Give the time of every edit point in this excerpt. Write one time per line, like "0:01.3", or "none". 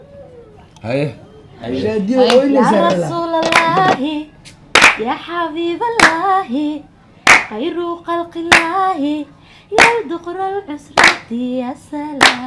0:01.7